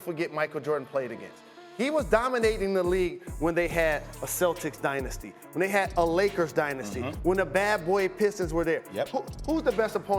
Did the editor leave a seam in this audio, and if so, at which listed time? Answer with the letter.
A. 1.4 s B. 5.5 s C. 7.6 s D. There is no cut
D